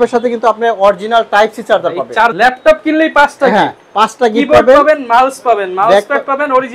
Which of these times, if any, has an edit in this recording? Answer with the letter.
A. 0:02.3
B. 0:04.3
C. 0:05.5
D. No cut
A